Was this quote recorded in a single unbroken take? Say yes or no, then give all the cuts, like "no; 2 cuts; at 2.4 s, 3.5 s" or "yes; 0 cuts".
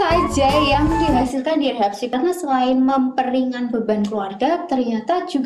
no; 1 cut; at 2.1 s